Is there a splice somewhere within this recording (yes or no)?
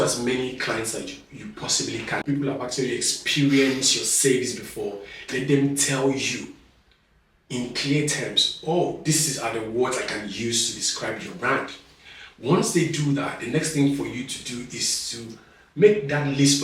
yes